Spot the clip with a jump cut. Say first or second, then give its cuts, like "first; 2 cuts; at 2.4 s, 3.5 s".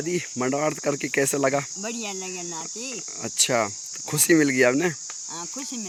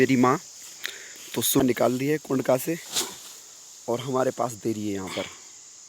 second; 1 cut; at 1.6 s